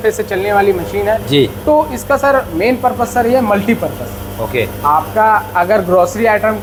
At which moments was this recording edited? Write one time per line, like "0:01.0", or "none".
none